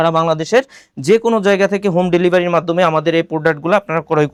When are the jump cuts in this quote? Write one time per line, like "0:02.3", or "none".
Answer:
none